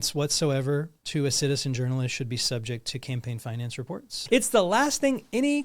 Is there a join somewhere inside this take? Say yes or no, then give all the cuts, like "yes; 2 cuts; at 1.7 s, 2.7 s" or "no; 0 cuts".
yes; 1 cut; at 4.2 s